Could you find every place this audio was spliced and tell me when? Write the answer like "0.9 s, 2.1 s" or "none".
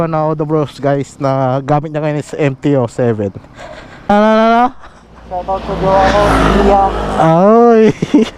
4.1 s